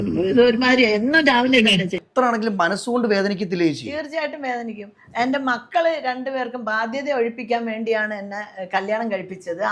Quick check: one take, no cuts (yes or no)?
no